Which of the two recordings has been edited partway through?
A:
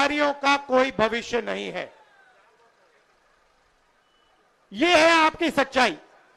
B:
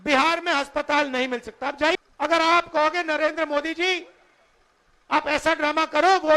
B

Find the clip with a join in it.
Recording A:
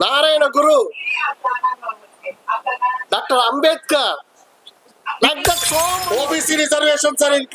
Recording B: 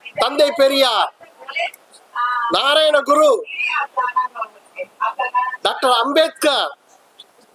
A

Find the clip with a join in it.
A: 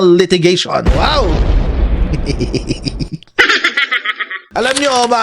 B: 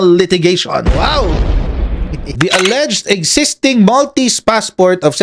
B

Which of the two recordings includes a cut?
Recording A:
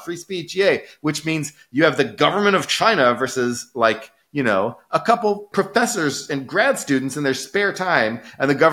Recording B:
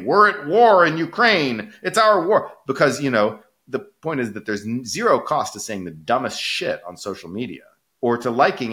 A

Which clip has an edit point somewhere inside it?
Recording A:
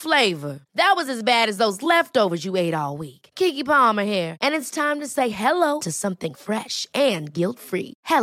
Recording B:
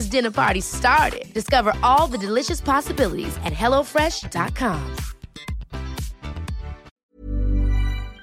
B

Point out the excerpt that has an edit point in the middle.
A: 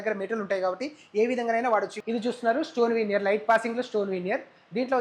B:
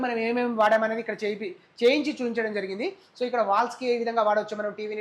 A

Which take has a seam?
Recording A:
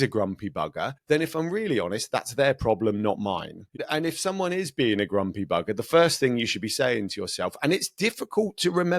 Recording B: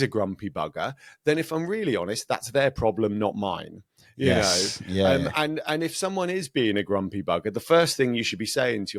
A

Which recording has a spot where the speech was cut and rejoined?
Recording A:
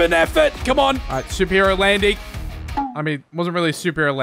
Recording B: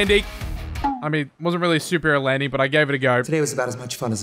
B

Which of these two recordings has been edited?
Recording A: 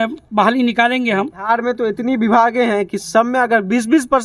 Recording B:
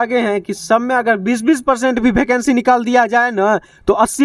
A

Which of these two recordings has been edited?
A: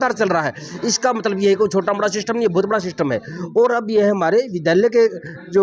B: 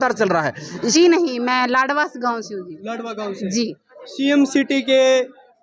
B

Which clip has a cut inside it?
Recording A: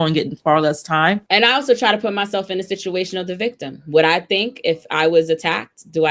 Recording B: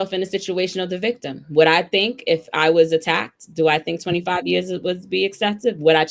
A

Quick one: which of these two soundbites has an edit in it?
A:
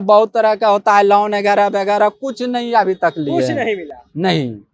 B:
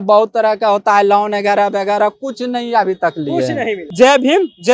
B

